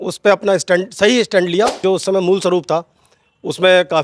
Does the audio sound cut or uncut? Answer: cut